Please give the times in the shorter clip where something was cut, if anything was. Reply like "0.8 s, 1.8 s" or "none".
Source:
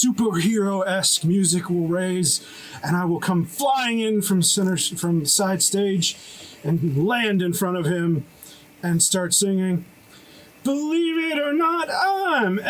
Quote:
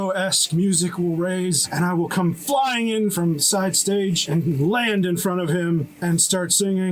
1.7 s, 3.1 s, 4.2 s, 5.9 s

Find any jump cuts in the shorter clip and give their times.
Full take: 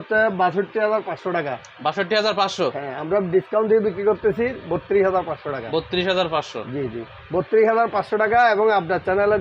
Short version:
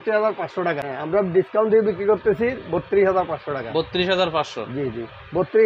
0.9 s

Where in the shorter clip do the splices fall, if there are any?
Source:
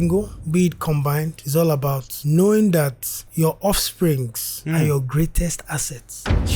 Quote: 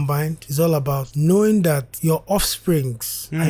1.1 s, 1.9 s

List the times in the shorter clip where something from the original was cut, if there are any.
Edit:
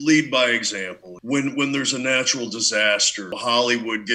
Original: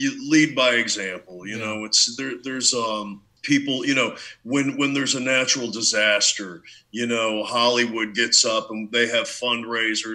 1.1 s, 3.4 s

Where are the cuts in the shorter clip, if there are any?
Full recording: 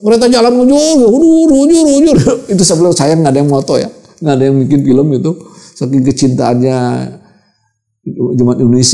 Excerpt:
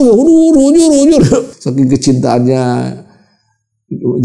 1.5 s

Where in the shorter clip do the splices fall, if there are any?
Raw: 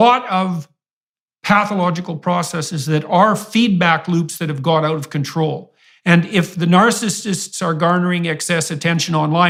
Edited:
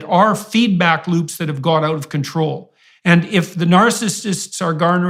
none

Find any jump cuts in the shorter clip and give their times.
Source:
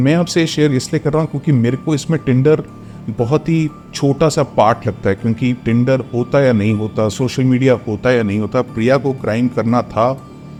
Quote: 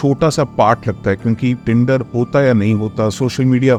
none

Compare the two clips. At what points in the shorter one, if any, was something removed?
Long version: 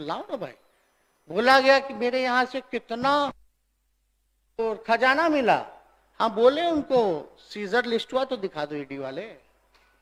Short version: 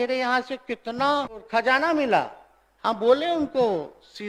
1.4 s

